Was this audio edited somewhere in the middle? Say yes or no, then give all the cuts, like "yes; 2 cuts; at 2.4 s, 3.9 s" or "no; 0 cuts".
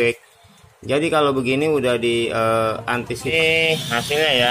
yes; 1 cut; at 3.3 s